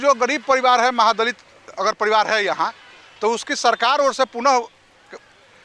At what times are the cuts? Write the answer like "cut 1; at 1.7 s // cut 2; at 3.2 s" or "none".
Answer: none